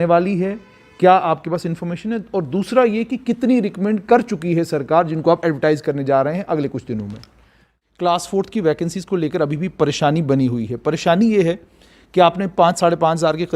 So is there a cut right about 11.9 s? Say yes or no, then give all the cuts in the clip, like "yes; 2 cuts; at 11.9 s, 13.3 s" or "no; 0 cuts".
no; 1 cut; at 7.7 s